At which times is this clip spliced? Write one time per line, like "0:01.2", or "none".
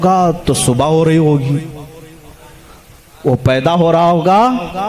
none

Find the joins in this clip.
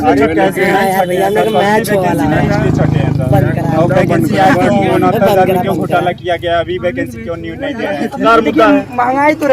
0:08.2

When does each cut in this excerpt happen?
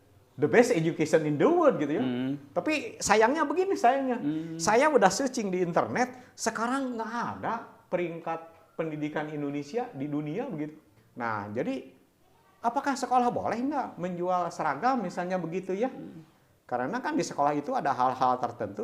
0:10.9

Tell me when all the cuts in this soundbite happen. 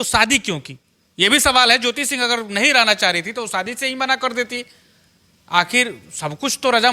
none

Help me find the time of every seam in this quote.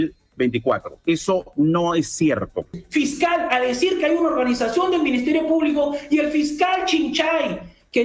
0:02.8

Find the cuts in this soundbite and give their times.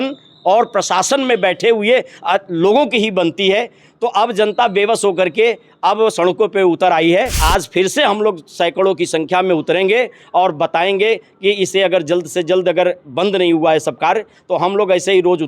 0:07.4

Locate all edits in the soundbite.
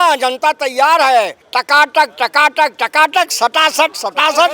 0:01.4

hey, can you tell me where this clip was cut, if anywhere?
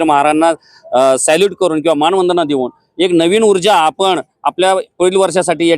none

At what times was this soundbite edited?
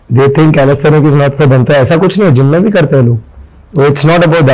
none

